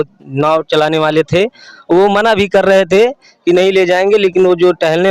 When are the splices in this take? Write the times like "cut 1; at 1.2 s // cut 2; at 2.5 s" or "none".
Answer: none